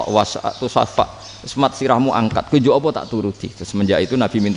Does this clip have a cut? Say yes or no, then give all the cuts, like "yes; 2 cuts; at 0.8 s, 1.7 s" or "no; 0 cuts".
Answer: no; 0 cuts